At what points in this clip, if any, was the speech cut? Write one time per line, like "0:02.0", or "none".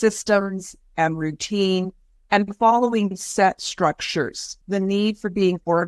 0:04.6